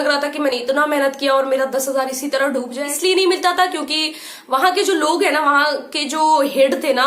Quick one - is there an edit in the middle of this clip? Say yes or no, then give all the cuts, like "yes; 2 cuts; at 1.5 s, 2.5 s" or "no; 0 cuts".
yes; 1 cut; at 2.8 s